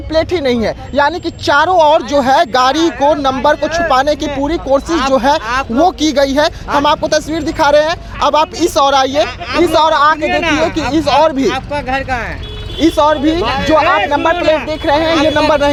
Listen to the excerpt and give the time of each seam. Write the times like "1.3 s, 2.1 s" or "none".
none